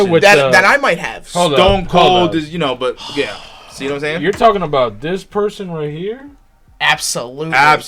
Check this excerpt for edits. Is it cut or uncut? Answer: uncut